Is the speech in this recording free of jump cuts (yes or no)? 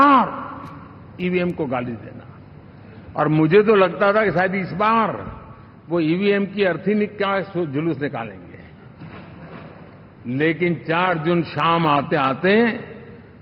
yes